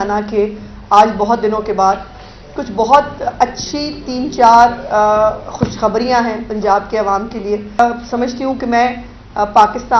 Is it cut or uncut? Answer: cut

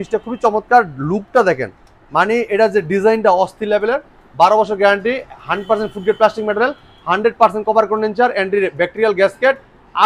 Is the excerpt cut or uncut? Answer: uncut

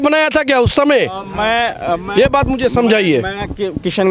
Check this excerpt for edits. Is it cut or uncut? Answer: uncut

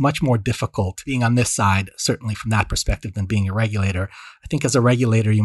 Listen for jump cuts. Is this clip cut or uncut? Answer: cut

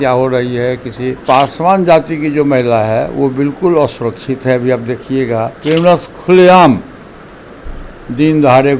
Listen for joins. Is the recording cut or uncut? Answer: cut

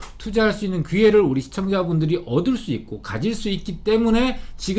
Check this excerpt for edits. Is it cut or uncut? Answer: uncut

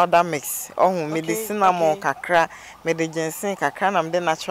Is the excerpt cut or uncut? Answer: uncut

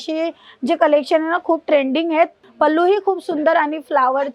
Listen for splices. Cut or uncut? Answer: cut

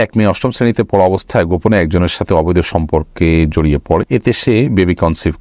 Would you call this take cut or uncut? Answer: cut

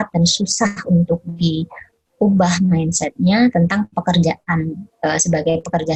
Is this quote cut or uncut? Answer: uncut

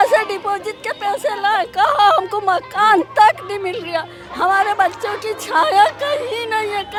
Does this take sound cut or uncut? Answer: uncut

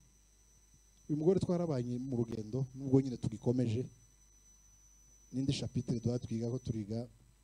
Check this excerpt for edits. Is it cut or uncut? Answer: uncut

